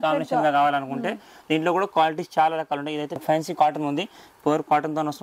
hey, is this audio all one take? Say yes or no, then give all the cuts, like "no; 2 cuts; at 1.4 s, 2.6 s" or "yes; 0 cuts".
yes; 0 cuts